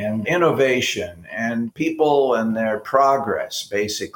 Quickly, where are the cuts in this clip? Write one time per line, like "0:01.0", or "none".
0:01.7